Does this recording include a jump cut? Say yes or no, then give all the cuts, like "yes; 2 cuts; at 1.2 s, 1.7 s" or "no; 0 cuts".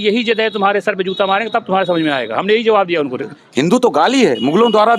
yes; 1 cut; at 3.3 s